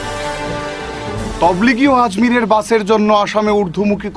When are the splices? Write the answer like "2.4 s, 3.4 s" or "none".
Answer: 1.2 s